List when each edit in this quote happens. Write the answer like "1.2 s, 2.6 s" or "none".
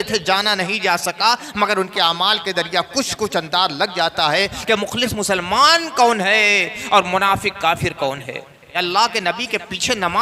8.7 s